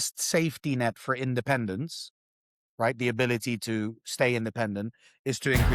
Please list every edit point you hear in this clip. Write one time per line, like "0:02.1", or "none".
none